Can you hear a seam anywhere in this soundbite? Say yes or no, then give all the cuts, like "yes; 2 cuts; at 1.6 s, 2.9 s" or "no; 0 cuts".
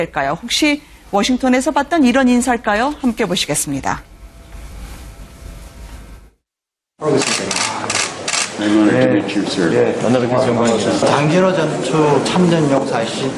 no; 0 cuts